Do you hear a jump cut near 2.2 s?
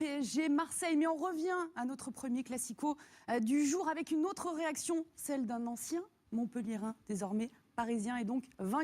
no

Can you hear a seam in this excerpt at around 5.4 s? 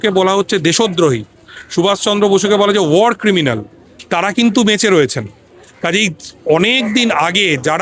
no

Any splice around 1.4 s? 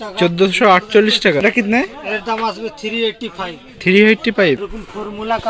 yes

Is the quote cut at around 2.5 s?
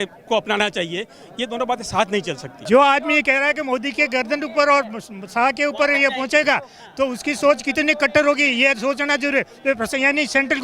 yes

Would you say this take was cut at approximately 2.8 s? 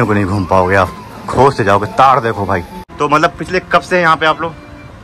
yes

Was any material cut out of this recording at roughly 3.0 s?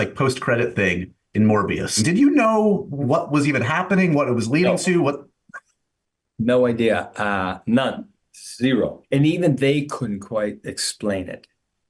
yes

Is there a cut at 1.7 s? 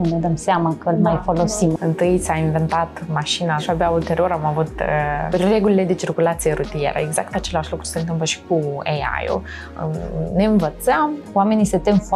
yes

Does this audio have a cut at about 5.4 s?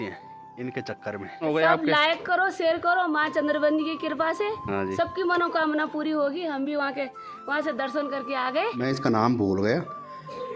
no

